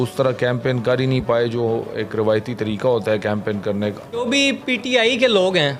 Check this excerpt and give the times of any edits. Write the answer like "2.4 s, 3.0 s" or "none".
4.3 s